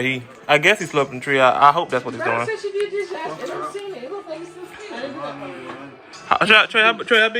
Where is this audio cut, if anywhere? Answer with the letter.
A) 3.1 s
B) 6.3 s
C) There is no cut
C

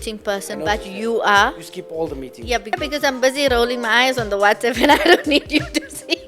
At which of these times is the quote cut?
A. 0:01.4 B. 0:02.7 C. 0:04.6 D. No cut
B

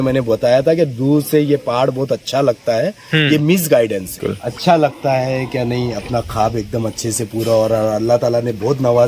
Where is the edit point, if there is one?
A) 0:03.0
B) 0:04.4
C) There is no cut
B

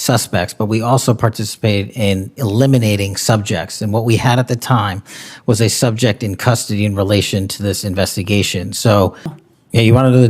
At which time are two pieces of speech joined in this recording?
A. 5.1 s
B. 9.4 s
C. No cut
B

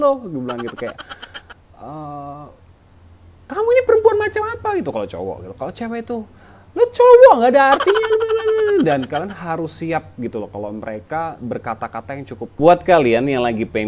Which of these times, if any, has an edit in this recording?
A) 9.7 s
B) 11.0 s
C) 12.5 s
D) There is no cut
C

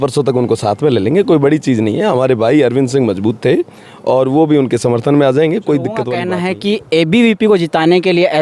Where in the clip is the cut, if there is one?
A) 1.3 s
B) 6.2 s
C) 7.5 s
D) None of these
B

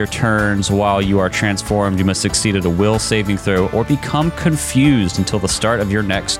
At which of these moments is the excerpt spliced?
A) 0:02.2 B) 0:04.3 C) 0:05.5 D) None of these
D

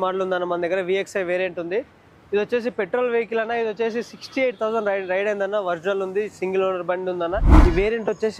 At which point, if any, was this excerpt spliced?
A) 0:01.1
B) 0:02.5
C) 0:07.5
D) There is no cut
C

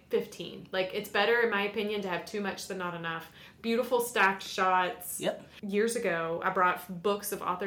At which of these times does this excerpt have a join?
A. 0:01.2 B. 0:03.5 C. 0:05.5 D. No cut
C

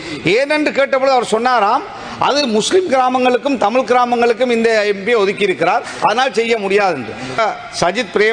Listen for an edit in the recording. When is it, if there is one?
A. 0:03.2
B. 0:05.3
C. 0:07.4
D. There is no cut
C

